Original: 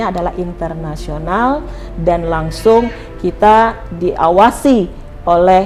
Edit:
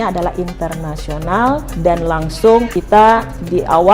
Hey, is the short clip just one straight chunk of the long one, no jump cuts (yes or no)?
no